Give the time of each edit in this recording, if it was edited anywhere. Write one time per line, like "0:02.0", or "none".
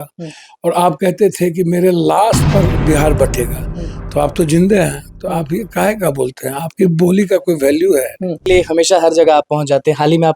0:08.4